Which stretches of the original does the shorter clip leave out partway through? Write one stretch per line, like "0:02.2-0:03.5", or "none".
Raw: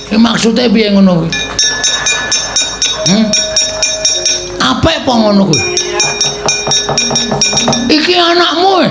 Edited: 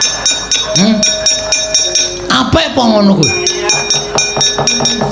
none